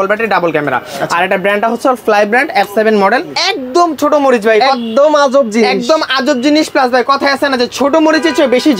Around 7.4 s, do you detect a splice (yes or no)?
no